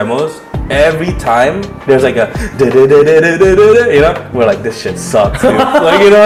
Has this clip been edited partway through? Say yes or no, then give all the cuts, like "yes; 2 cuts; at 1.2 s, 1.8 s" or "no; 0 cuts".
no; 0 cuts